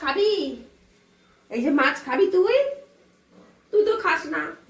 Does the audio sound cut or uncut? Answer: uncut